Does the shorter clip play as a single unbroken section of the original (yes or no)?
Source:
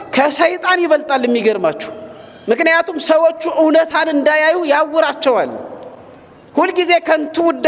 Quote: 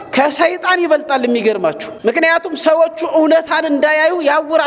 no